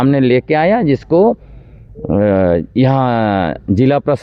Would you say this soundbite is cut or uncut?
uncut